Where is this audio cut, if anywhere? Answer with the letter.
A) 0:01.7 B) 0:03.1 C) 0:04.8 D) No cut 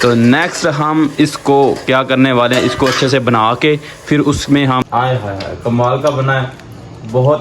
C